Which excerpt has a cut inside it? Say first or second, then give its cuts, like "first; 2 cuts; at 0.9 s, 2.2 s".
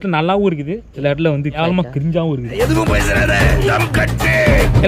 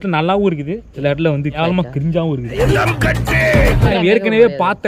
second; 2 cuts; at 2.7 s, 3.9 s